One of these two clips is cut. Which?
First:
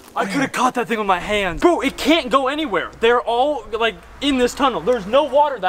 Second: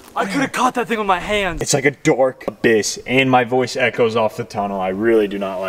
second; 1 cut; at 1.6 s

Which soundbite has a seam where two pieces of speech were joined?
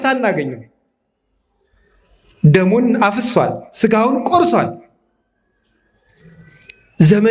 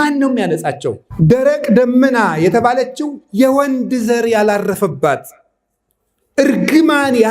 second; 1 cut; at 1.0 s

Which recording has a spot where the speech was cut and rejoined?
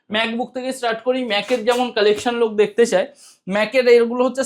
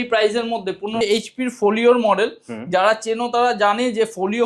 second; 1 cut; at 1.0 s

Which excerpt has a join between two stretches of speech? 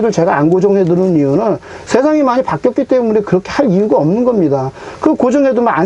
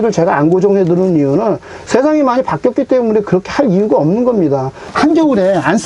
second; 1 cut; at 4.9 s

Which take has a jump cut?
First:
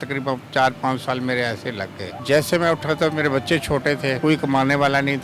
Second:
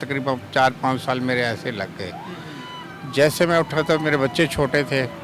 first; 2 cuts; at 2.1 s, 4.2 s

